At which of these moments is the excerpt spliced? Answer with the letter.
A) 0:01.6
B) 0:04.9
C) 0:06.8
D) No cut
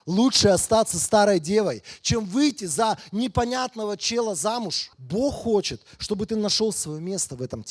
B